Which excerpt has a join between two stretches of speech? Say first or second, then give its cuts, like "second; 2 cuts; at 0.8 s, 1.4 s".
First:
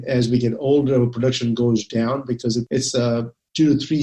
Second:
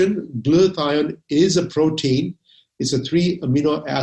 first; 1 cut; at 2.7 s